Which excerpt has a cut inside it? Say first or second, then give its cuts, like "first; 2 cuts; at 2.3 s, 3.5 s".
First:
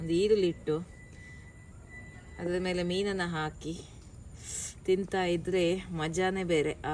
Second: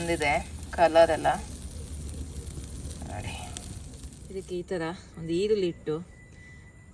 second; 1 cut; at 4.1 s